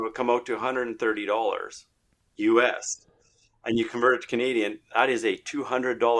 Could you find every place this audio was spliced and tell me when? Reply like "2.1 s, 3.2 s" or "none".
none